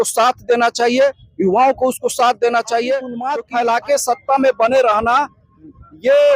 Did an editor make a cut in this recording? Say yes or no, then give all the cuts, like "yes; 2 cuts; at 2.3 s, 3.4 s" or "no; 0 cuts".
yes; 1 cut; at 3.3 s